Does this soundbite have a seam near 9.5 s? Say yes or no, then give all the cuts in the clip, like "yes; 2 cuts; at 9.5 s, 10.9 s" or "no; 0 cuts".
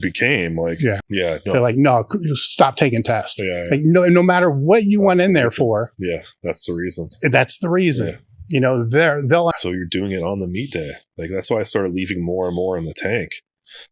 yes; 2 cuts; at 1.0 s, 9.5 s